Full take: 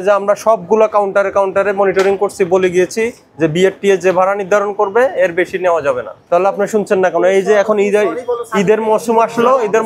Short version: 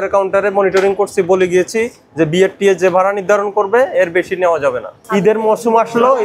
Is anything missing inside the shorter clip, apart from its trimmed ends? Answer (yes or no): yes